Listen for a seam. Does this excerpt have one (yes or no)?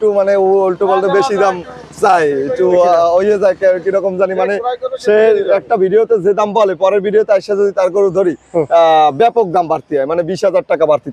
no